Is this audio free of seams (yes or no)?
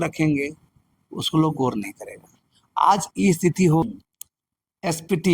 no